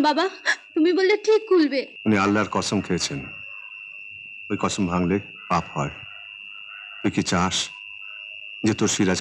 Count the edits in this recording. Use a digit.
1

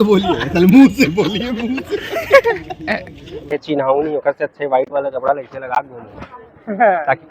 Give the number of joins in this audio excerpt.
1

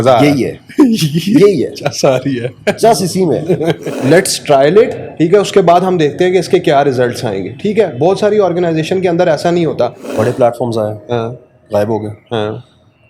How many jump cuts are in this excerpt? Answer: 2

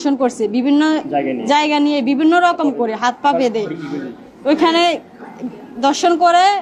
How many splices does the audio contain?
0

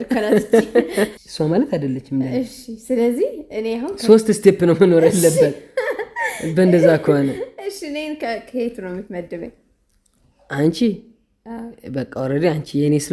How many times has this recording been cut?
1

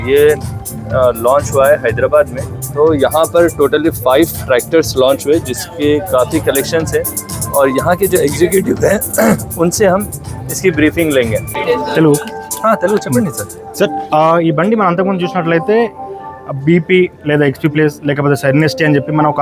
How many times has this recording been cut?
1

